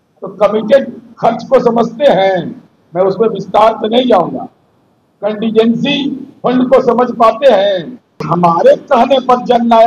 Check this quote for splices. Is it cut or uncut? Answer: cut